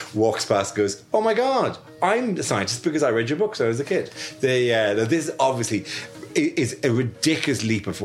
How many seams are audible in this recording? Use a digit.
0